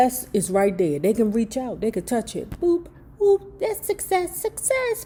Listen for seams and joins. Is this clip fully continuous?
yes; 0 cuts

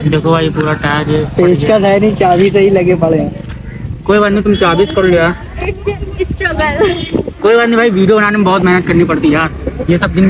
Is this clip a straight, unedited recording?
yes; 0 cuts

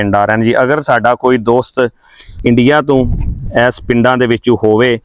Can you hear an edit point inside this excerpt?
no; 0 cuts

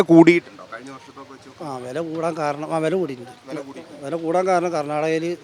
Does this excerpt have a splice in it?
no; 0 cuts

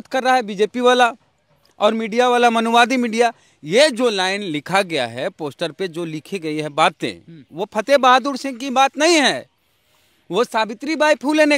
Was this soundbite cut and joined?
no; 0 cuts

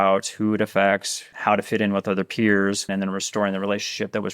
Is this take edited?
yes; 2 cuts; at 1.2 s, 2.9 s

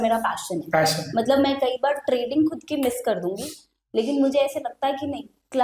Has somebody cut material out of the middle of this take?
no; 0 cuts

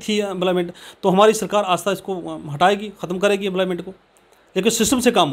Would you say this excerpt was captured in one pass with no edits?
yes; 0 cuts

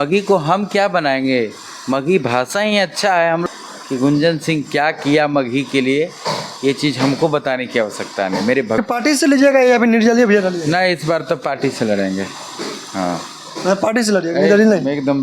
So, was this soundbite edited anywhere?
yes; 2 cuts; at 3.4 s, 8.8 s

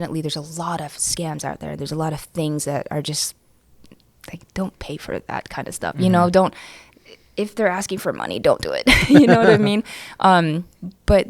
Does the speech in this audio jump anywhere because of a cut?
no; 0 cuts

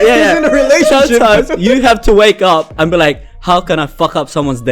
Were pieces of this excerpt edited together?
no; 0 cuts

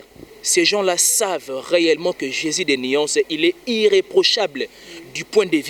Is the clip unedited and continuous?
yes; 0 cuts

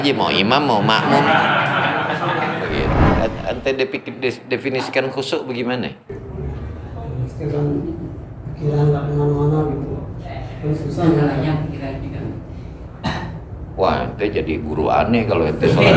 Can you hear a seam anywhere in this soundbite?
yes; 1 cut; at 2.9 s

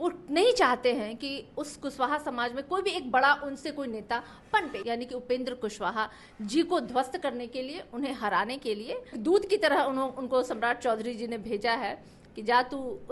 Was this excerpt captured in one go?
no; 2 cuts; at 4.8 s, 9.2 s

